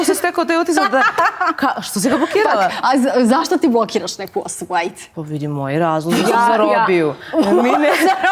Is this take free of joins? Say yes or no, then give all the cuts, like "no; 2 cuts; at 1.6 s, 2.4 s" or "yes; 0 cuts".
no; 1 cut; at 5.0 s